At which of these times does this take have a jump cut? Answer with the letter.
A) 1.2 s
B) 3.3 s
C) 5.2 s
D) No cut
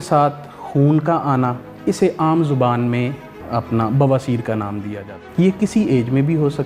C